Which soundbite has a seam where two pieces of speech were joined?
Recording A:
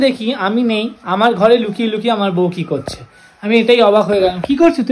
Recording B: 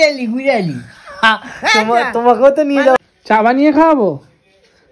B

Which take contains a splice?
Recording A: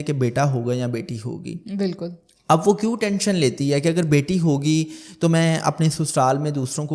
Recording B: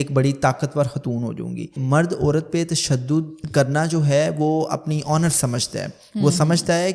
B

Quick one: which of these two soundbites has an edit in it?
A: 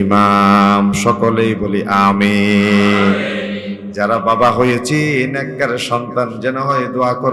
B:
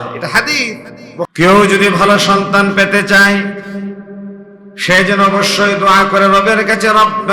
B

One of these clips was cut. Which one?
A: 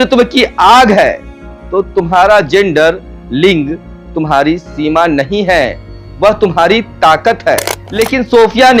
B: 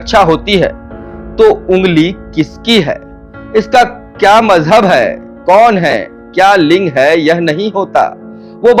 A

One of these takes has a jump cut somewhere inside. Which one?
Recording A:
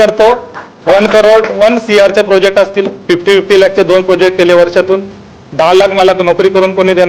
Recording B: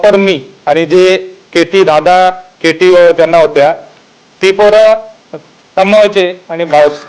A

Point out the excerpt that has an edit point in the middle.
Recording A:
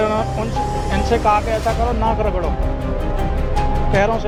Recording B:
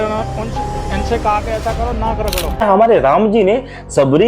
B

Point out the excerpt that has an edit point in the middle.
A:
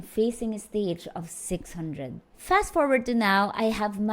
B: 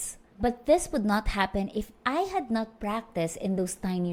A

